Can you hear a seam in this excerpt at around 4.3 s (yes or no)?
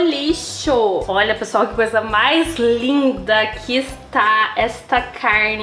no